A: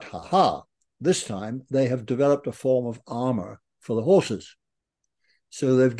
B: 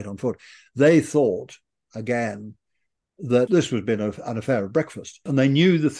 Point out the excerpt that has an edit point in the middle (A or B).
B